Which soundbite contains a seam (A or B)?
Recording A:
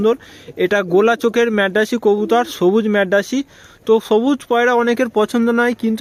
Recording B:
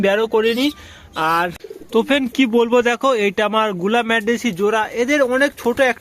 B